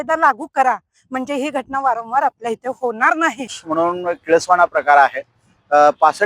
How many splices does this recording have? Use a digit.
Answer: 1